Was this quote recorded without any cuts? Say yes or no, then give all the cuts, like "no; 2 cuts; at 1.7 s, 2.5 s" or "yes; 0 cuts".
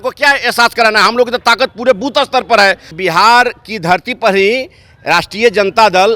no; 1 cut; at 2.9 s